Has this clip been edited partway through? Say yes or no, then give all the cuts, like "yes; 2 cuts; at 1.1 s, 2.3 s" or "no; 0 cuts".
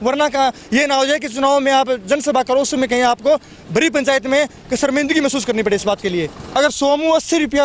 yes; 1 cut; at 6.4 s